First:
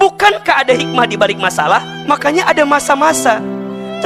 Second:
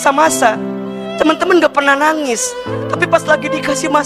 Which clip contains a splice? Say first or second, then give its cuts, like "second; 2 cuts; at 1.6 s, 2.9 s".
first; 1 cut; at 1.9 s